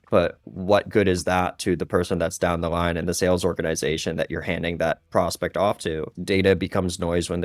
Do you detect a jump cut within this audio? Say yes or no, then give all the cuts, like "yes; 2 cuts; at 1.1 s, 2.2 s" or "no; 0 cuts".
yes; 1 cut; at 6.1 s